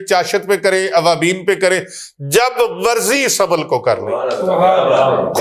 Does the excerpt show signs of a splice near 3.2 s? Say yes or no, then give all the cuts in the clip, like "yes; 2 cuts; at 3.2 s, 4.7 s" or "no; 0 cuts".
no; 0 cuts